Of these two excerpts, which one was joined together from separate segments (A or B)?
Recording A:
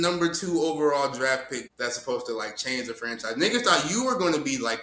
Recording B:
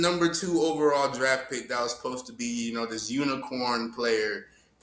A